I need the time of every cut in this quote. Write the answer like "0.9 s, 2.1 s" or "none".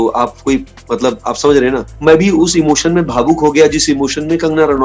1.9 s